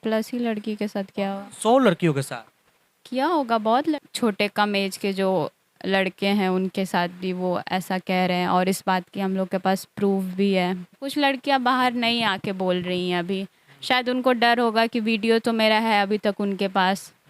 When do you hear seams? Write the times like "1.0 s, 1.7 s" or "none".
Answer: 4.0 s, 11.0 s